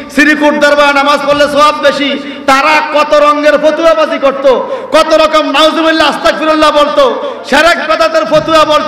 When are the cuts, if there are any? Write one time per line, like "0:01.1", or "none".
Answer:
none